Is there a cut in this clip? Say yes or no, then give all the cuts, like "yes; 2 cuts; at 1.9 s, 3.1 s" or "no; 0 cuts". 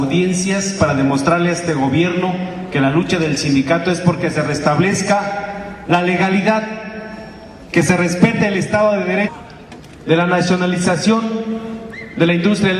no; 0 cuts